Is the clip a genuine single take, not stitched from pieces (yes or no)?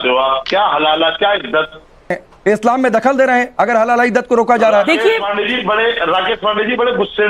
no